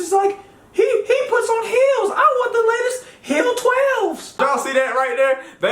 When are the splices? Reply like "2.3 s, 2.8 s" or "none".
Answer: 4.4 s